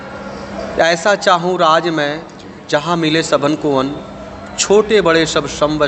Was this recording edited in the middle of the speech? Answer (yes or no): no